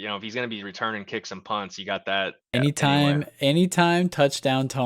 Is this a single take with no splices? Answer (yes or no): no